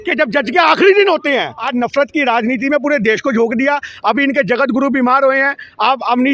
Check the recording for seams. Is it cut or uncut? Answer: cut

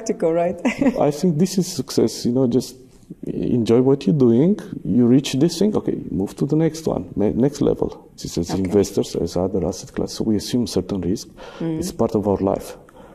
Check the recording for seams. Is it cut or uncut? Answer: cut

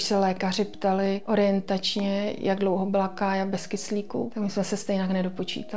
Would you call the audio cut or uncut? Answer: cut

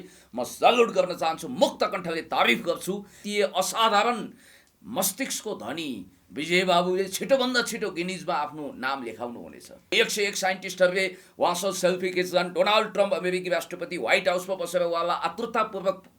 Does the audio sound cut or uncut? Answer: cut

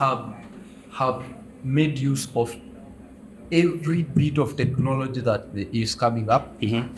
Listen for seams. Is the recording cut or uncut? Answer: uncut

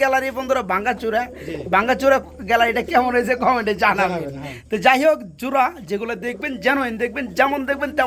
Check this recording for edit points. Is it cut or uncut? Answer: uncut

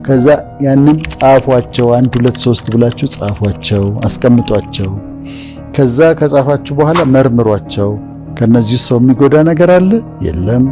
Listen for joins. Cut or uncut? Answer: uncut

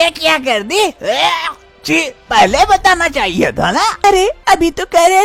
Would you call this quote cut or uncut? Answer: uncut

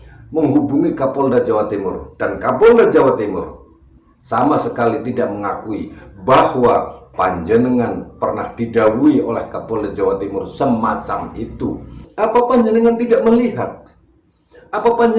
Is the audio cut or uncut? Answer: cut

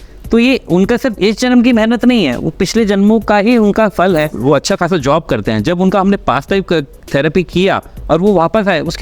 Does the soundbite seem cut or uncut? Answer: cut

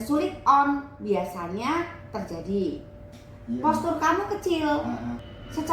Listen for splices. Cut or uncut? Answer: cut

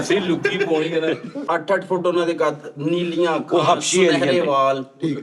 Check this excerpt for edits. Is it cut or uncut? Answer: cut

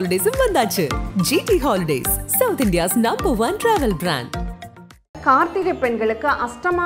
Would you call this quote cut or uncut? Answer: cut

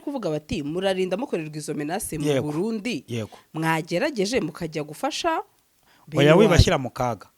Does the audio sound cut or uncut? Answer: uncut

